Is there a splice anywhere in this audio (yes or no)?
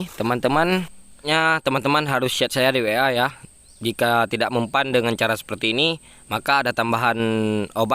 yes